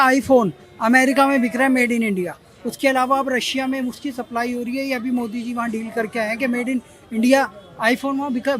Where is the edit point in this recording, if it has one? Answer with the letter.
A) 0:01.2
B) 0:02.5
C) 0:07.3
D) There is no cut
D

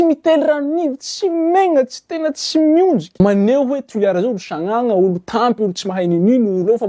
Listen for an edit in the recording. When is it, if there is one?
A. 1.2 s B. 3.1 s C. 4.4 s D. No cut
B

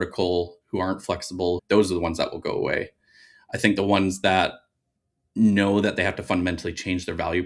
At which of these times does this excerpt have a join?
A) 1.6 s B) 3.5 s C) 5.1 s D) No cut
A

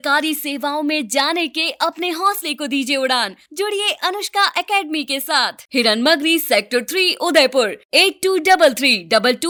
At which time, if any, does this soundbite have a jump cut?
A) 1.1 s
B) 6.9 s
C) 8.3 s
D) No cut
D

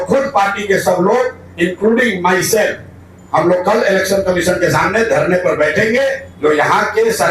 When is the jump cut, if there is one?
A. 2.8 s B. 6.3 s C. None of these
B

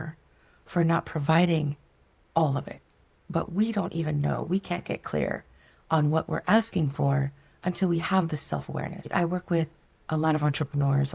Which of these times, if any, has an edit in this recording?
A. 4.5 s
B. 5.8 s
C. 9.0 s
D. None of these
C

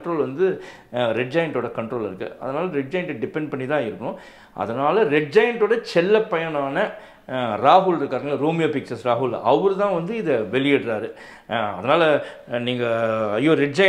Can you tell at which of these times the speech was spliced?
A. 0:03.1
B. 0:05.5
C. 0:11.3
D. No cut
D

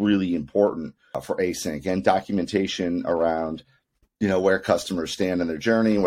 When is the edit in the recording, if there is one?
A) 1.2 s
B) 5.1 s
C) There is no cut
A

